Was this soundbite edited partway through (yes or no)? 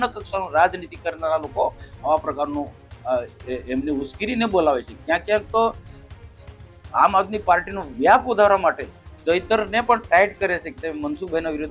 no